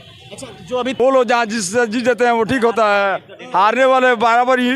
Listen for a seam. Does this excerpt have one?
yes; 1 cut; at 1.0 s

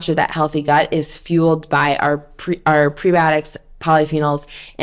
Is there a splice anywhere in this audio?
no; 0 cuts

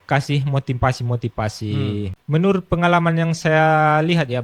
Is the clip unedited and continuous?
no; 1 cut; at 2.2 s

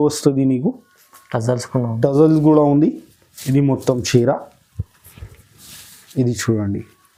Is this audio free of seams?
yes; 0 cuts

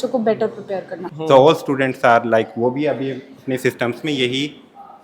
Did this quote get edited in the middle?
yes; 1 cut; at 1.0 s

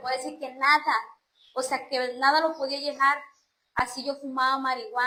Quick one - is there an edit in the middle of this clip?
no; 0 cuts

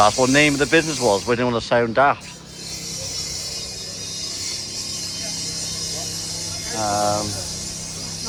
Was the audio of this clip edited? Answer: no; 0 cuts

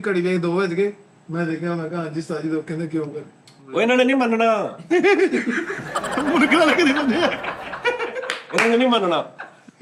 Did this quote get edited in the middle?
no; 0 cuts

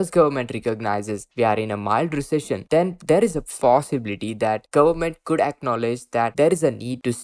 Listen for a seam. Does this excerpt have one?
yes; 1 cut; at 3.5 s

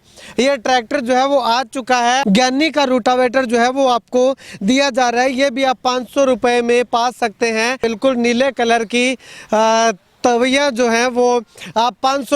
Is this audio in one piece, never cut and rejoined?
no; 2 cuts; at 2.2 s, 7.8 s

